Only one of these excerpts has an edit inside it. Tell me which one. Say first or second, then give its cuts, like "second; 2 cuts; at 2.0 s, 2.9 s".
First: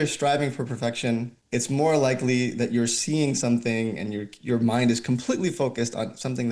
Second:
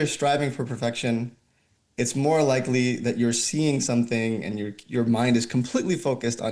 first; 1 cut; at 1.4 s